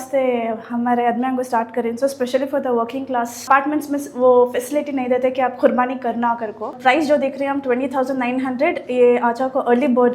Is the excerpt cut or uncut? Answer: cut